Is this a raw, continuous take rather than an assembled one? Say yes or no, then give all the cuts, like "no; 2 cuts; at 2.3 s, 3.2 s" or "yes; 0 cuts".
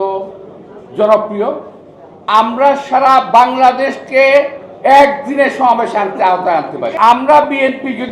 no; 1 cut; at 6.9 s